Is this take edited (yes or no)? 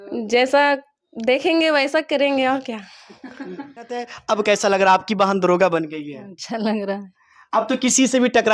yes